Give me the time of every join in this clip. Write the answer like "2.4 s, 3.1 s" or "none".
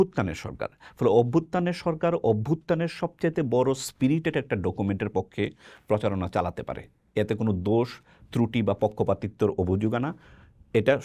none